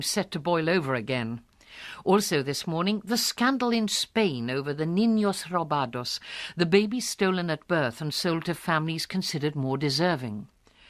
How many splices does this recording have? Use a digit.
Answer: 0